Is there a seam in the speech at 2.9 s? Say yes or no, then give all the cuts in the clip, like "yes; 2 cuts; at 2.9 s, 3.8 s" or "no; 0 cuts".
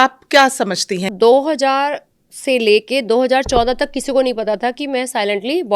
no; 1 cut; at 1.1 s